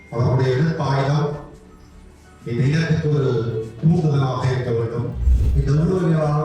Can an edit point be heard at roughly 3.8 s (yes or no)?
no